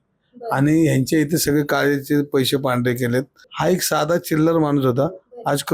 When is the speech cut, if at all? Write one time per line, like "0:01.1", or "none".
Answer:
0:03.4